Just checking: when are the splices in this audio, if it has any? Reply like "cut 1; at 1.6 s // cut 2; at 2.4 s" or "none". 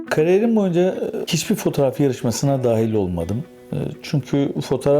cut 1; at 1.3 s